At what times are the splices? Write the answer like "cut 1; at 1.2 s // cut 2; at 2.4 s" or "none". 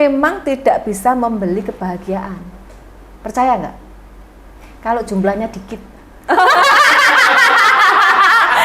none